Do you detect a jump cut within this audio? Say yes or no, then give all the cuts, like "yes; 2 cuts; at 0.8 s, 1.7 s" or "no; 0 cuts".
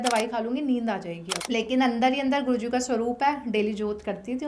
yes; 1 cut; at 1.3 s